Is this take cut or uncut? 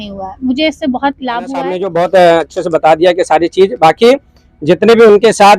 cut